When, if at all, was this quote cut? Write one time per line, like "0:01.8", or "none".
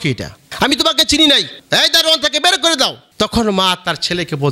0:03.0